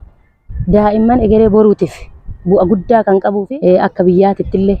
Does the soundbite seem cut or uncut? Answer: uncut